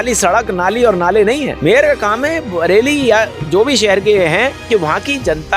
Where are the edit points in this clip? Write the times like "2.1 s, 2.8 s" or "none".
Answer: 1.5 s, 4.6 s